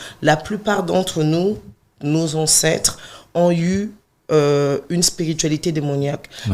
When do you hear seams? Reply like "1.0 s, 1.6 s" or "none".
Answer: none